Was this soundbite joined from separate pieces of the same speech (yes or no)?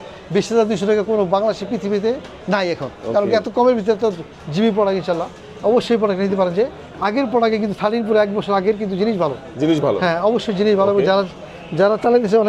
no